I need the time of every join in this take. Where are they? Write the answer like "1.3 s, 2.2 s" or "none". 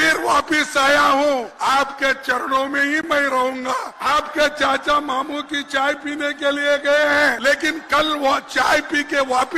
1.5 s, 3.9 s, 7.4 s